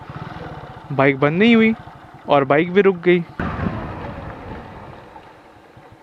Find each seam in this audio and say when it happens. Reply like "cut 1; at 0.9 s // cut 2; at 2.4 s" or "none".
cut 1; at 3.4 s